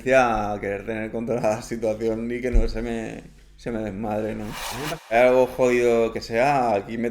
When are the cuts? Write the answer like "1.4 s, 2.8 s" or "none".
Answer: 5.1 s

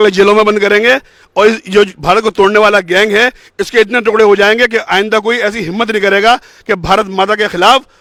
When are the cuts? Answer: none

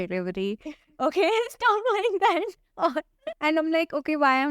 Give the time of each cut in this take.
3.2 s

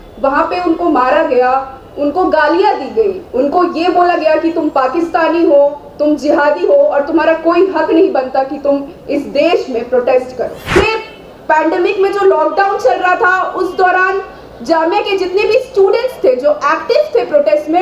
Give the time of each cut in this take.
10.8 s

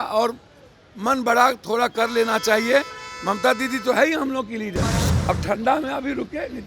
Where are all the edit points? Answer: 5.1 s

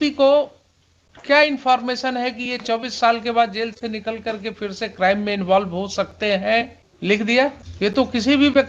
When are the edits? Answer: 6.8 s, 7.6 s

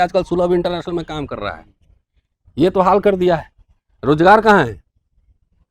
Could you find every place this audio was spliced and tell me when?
none

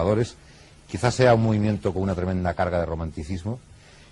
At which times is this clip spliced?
3.1 s

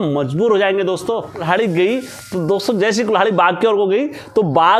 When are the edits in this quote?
1.4 s

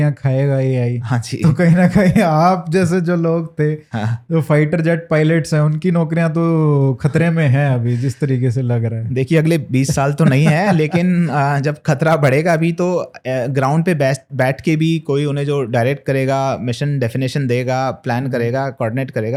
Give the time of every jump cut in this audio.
none

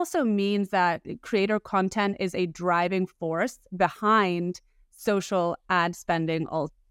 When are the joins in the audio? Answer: none

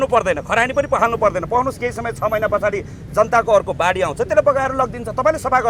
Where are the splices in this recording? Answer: none

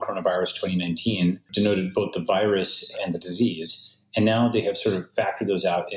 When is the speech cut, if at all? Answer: 1.5 s

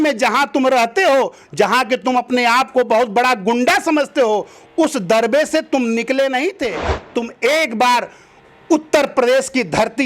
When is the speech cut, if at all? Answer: 6.9 s

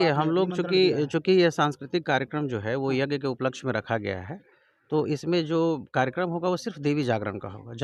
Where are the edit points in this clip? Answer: none

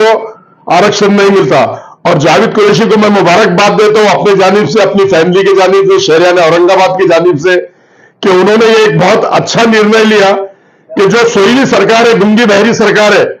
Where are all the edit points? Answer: none

